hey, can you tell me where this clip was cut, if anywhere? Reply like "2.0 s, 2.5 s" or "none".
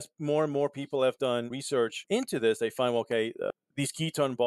1.7 s